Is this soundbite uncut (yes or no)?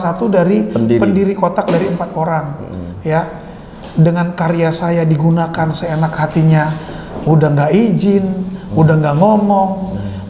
yes